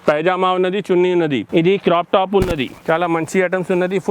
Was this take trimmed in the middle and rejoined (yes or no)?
yes